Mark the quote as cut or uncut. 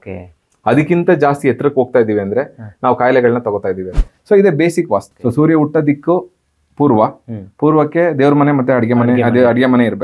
cut